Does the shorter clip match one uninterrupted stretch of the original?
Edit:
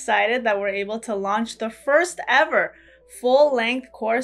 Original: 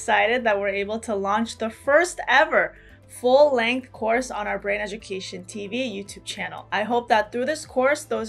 yes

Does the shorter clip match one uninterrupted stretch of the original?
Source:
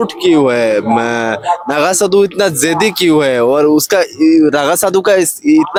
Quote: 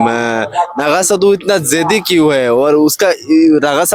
yes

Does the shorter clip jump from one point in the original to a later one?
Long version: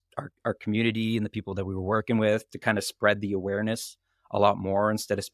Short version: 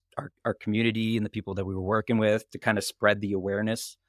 no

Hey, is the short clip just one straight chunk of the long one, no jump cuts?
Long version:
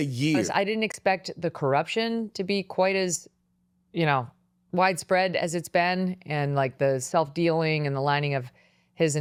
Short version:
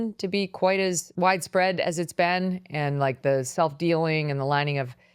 no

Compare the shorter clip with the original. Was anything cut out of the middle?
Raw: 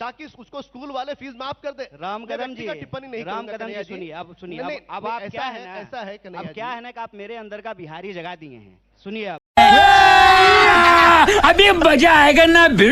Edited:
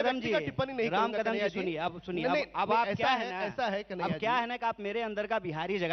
no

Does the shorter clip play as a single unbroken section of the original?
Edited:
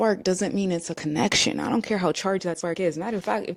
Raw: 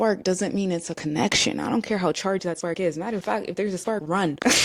yes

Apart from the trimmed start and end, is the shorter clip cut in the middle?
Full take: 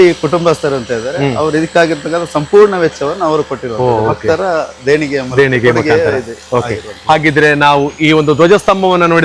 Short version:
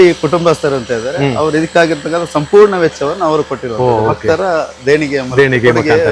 no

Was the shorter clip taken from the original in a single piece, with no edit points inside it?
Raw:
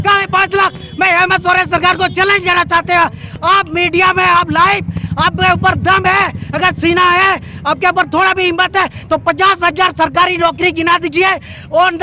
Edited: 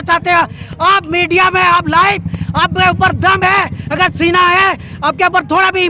yes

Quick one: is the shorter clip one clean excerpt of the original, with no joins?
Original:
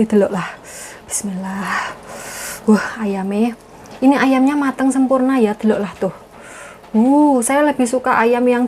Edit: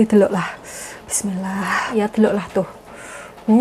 no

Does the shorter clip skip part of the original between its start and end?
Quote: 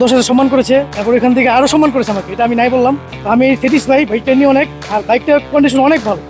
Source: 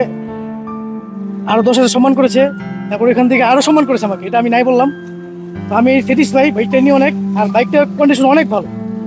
yes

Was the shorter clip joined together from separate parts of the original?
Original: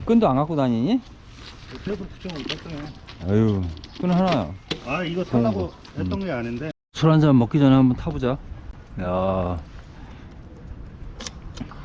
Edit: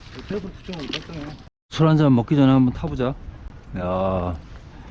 yes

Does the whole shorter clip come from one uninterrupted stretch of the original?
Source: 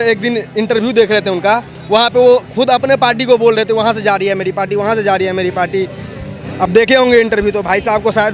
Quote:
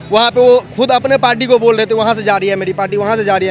yes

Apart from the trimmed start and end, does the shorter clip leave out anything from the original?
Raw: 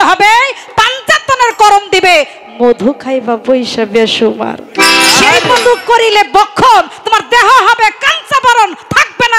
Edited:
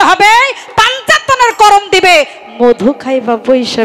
no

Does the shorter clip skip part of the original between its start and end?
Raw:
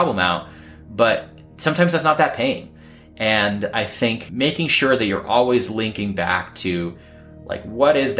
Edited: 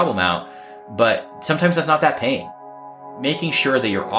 yes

